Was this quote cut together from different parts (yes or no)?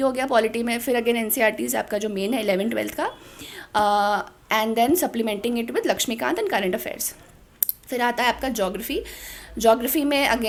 no